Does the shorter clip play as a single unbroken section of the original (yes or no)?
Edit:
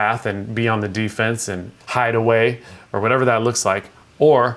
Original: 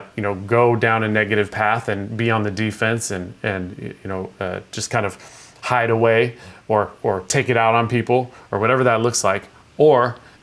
no